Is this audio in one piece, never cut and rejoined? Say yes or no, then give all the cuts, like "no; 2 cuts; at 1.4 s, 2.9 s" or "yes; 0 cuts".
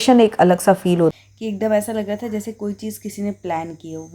no; 1 cut; at 1.2 s